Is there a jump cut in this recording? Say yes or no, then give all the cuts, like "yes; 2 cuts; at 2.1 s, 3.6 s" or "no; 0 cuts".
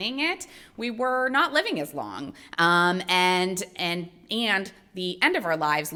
no; 0 cuts